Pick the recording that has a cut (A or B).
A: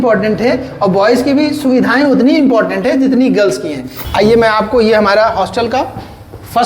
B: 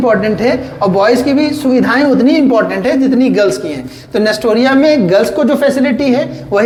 A